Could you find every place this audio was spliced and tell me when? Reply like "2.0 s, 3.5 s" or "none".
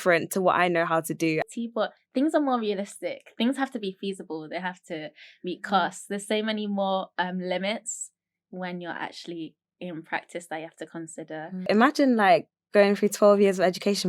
1.5 s, 11.7 s